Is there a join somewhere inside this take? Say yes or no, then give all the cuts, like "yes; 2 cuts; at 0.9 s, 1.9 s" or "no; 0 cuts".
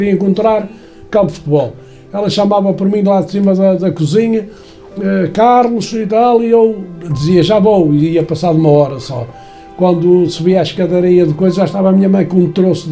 no; 0 cuts